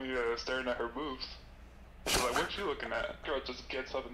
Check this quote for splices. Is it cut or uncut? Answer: cut